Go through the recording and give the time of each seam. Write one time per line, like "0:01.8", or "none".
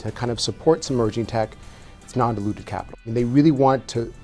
0:03.0